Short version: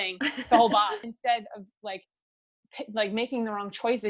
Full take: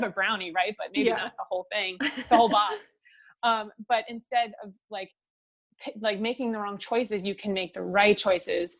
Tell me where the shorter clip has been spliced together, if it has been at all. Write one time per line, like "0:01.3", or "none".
0:01.1